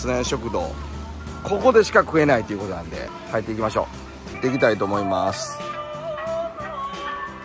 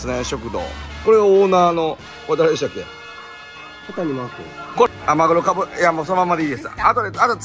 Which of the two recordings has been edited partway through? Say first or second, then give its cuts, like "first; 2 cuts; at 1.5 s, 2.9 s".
second; 2 cuts; at 1.0 s, 4.9 s